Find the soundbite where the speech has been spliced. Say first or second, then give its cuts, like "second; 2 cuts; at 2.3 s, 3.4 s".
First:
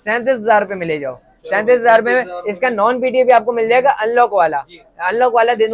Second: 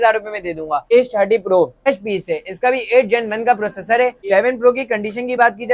second; 3 cuts; at 0.8 s, 1.9 s, 4.2 s